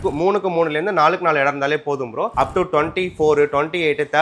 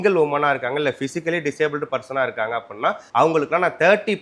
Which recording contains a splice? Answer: first; 1 cut; at 2.3 s

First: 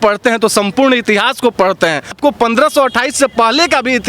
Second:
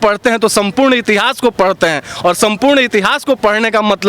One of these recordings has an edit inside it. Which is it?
first; 1 cut; at 2.1 s

